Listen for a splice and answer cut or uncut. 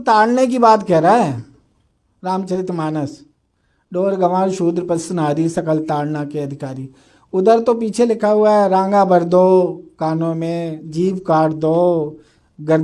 uncut